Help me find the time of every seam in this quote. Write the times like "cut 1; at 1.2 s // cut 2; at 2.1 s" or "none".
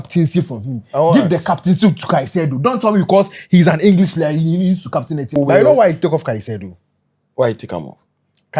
cut 1; at 5.4 s